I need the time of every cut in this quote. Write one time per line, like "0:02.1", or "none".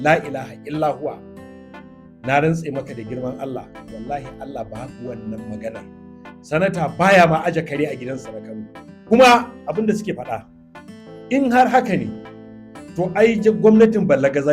0:09.0